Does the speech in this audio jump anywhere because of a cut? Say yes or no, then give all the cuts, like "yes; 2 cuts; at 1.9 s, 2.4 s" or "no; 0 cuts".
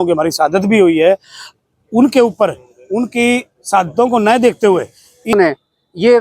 yes; 1 cut; at 5.3 s